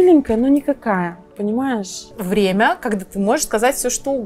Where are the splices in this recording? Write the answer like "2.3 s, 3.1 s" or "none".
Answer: 2.0 s